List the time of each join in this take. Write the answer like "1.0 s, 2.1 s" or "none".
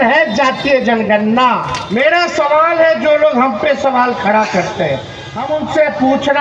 1.8 s, 5.4 s